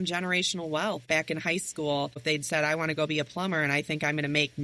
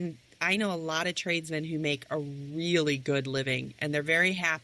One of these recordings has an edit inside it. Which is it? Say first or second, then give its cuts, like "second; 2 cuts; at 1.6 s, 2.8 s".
first; 2 cuts; at 1.0 s, 2.2 s